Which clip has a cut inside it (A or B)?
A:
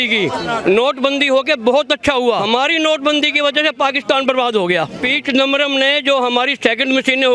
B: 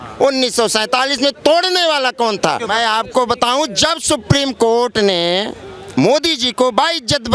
A